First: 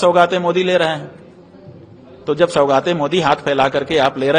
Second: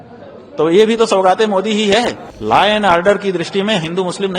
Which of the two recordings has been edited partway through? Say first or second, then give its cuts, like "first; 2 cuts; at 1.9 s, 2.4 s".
second; 1 cut; at 2.3 s